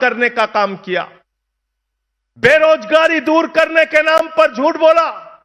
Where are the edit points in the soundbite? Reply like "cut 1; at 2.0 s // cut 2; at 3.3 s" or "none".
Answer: none